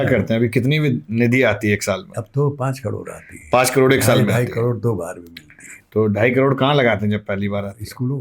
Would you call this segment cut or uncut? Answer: uncut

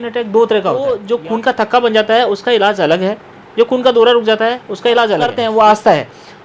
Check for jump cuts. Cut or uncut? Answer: cut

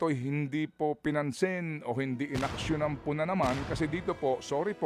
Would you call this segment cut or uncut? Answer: uncut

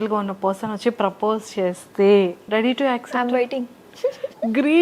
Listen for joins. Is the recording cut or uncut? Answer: cut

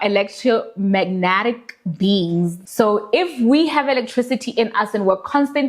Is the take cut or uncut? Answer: cut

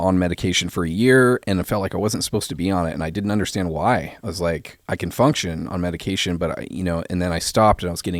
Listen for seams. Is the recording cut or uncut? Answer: uncut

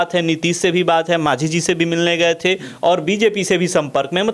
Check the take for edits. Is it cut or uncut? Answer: uncut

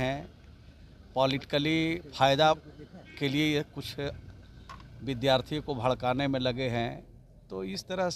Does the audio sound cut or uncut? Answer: uncut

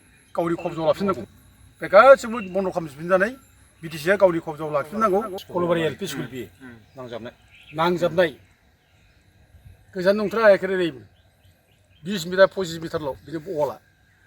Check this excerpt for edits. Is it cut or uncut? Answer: cut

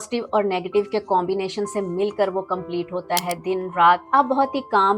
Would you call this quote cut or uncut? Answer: cut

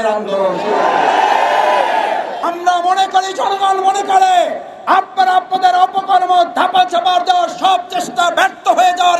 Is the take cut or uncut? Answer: cut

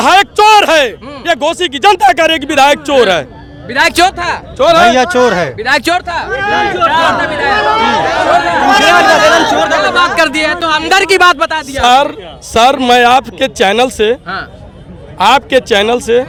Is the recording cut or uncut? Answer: uncut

